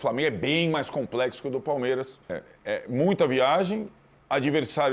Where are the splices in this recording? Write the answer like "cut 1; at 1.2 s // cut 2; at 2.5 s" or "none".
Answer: cut 1; at 2.5 s